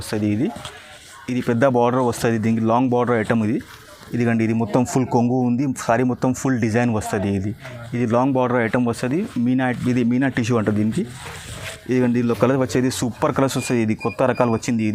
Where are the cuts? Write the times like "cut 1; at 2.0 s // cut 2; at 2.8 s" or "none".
none